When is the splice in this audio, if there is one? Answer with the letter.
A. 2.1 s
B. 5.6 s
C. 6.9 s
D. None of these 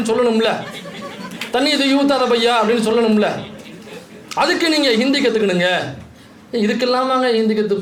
D